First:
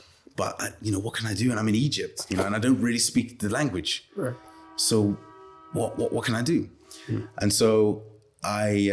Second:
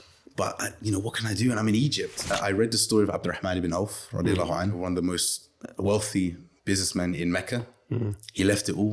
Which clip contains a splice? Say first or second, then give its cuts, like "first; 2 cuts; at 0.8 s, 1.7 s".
second; 2 cuts; at 2.3 s, 4.8 s